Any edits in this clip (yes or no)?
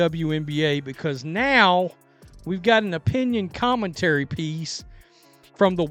no